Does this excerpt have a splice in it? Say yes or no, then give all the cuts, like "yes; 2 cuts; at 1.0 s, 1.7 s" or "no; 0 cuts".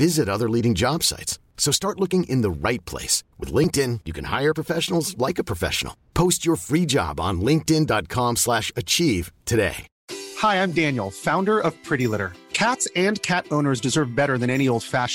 yes; 1 cut; at 9.9 s